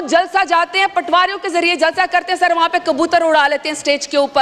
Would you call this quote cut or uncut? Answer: uncut